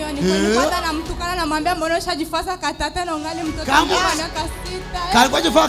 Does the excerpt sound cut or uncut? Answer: uncut